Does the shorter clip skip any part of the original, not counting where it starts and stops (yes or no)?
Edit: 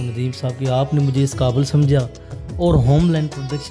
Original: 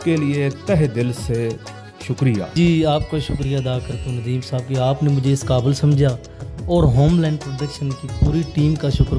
no